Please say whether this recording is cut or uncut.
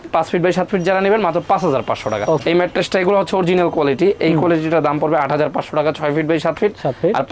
cut